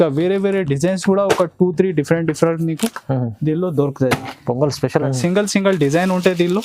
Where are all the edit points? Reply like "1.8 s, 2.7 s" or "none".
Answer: 5.1 s